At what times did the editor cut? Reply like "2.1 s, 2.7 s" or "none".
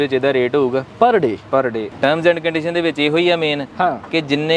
1.9 s

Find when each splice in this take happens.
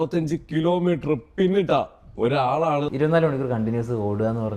2.9 s

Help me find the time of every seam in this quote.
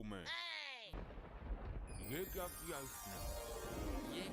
1.0 s

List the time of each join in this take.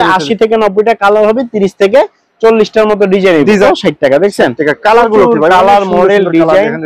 3.7 s

